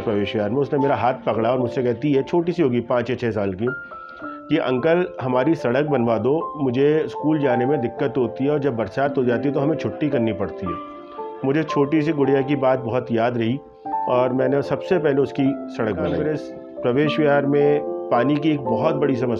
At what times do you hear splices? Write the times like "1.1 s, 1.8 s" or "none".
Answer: 16.2 s